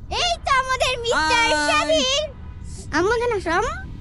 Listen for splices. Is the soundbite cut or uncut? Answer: uncut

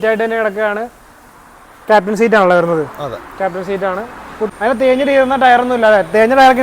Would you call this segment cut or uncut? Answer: cut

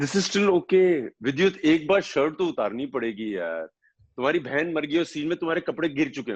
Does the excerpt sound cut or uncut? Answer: uncut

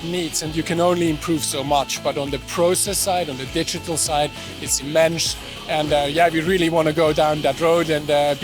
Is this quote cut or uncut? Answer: uncut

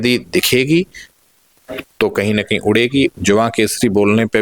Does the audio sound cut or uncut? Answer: cut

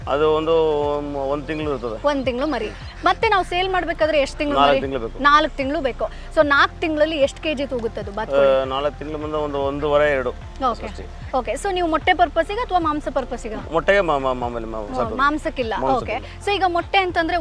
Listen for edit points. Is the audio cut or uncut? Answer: uncut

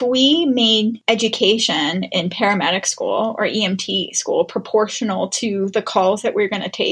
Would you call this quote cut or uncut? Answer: cut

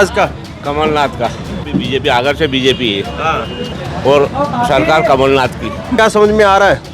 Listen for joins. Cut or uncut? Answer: cut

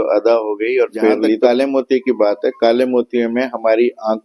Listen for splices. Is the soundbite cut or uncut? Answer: cut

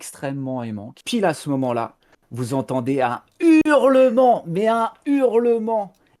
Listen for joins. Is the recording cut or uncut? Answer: cut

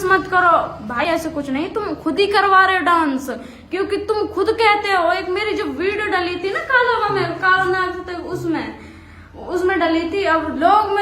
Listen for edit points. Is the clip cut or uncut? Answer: cut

